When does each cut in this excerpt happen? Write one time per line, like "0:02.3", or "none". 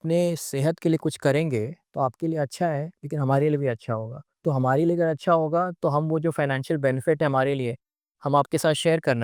none